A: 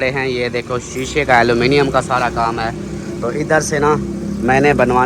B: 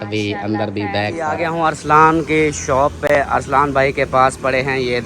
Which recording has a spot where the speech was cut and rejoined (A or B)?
B